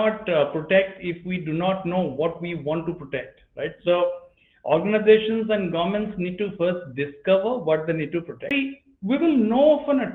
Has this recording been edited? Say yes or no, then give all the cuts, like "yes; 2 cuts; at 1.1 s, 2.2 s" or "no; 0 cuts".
yes; 1 cut; at 8.4 s